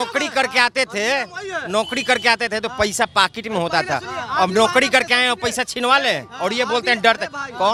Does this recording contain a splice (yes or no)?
no